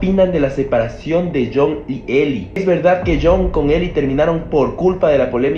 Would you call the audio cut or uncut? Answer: uncut